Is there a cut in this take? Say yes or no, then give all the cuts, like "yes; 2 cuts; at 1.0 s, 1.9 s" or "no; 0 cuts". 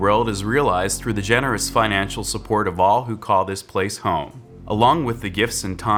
no; 0 cuts